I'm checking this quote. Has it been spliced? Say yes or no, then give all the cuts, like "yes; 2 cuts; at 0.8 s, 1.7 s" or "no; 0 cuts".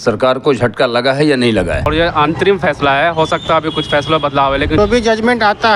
yes; 2 cuts; at 1.9 s, 4.8 s